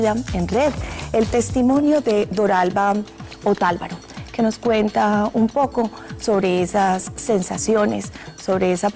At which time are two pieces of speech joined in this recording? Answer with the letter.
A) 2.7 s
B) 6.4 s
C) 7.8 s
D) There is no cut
D